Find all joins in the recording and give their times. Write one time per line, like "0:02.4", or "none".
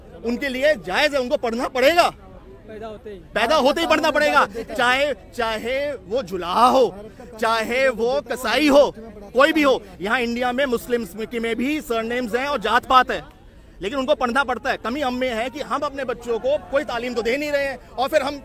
none